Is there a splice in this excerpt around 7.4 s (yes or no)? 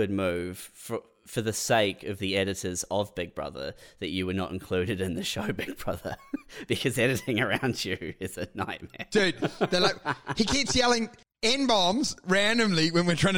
no